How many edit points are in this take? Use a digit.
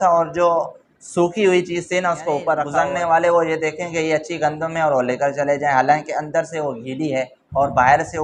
1